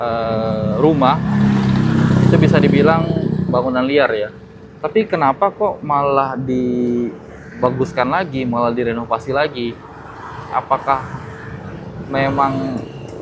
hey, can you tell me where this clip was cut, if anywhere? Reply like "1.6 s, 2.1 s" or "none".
none